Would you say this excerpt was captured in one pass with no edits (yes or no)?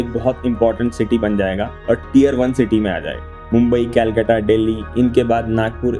yes